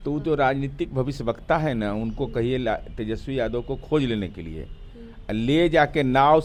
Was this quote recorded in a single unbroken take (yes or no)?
yes